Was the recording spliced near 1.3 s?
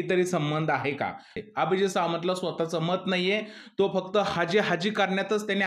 yes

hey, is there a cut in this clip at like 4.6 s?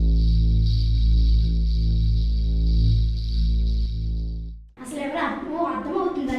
yes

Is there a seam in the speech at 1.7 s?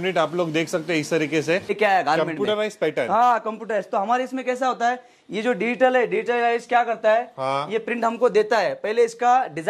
yes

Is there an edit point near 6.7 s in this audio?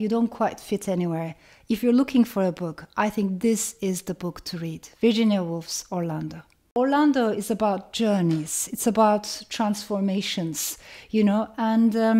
yes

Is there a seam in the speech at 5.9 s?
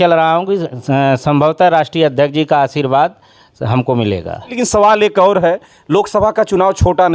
no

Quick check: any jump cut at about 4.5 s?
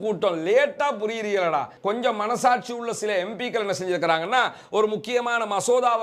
no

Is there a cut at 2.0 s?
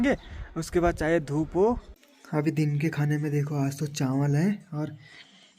yes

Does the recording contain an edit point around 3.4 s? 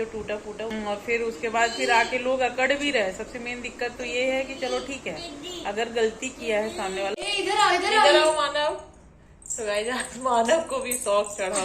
no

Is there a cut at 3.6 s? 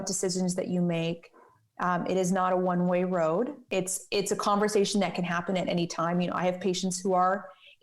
yes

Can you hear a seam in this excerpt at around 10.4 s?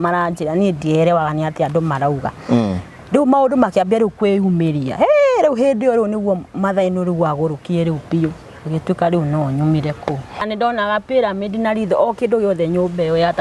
yes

